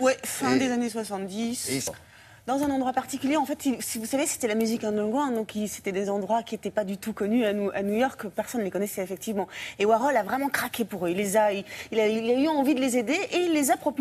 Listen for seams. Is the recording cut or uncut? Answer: cut